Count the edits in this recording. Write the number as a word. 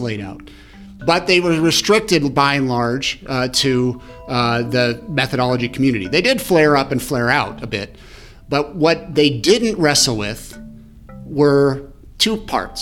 one